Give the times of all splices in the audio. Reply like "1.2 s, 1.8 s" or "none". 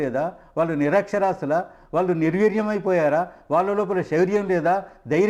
none